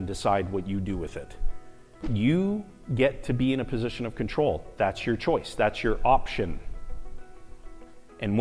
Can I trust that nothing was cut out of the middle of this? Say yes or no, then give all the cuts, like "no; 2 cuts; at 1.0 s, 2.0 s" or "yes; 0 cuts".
no; 1 cut; at 2.0 s